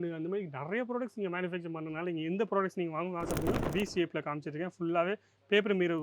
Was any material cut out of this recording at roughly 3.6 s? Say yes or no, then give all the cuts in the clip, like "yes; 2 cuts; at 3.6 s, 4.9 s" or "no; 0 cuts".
yes; 1 cut; at 3.6 s